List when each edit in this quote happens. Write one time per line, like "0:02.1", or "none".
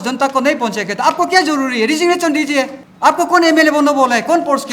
0:02.8